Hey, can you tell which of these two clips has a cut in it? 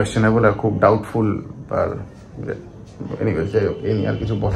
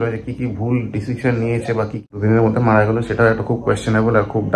second; 1 cut; at 2.0 s

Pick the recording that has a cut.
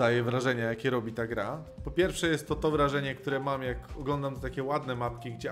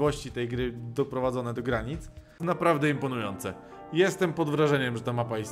second; 1 cut; at 2.3 s

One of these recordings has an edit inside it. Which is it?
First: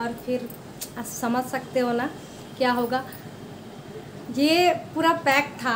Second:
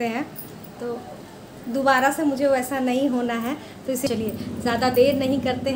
second; 1 cut; at 4.1 s

